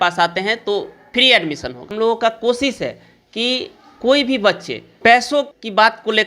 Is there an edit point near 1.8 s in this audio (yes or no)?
yes